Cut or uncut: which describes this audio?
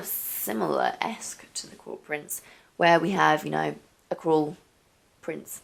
uncut